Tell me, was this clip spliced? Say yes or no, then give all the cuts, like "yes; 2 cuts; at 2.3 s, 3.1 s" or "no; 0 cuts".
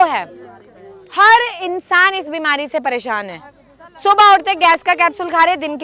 no; 0 cuts